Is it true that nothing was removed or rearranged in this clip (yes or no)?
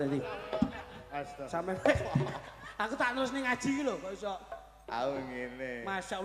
yes